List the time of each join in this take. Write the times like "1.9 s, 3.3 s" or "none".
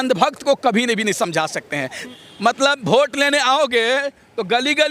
2.0 s